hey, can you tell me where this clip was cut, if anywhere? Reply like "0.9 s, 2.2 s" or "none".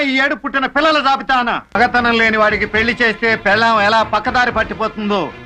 1.8 s